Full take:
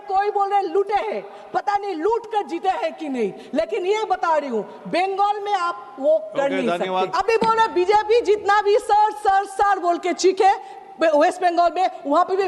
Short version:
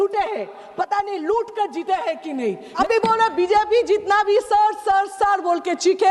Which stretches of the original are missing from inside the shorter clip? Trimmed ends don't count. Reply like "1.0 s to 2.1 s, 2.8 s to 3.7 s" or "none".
3.5 s to 7.1 s